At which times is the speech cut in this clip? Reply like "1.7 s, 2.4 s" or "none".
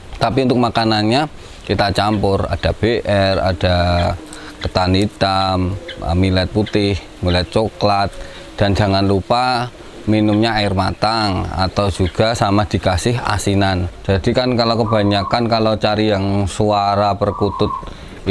13.9 s